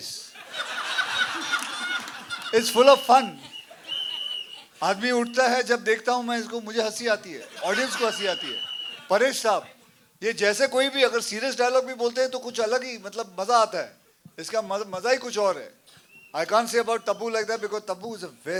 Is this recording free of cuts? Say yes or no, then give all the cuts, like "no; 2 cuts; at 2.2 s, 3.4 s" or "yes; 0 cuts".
yes; 0 cuts